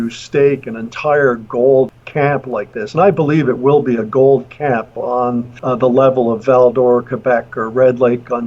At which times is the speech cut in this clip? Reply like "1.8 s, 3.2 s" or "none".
2.0 s, 5.5 s